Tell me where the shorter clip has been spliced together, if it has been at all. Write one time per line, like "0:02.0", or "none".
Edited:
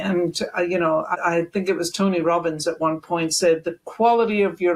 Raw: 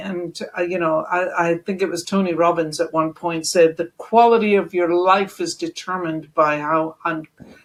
0:01.1

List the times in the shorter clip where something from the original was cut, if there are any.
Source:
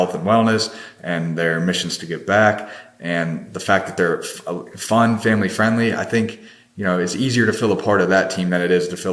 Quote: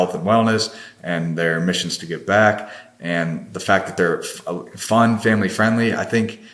none

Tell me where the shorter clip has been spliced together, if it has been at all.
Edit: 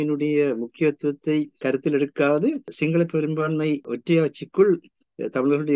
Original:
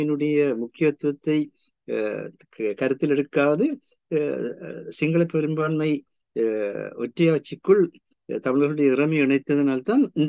0:01.6
0:02.7
0:03.9

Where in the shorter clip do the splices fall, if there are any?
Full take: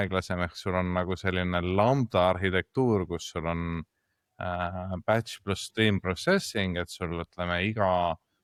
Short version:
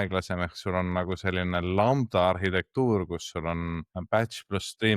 0:03.9

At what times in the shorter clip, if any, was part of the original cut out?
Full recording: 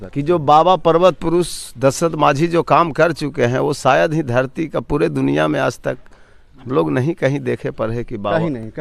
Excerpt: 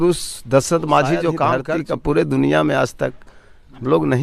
0:01.7

